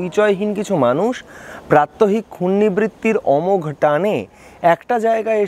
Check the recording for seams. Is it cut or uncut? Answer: uncut